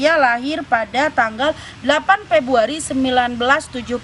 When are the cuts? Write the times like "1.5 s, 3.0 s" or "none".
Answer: none